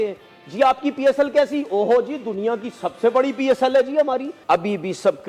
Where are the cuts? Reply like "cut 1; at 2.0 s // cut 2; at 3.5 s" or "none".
cut 1; at 4.3 s